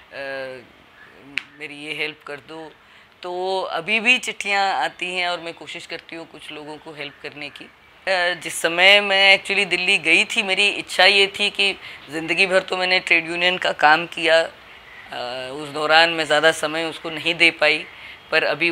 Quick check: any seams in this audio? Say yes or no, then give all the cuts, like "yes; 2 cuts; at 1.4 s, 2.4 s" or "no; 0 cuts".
yes; 1 cut; at 8.0 s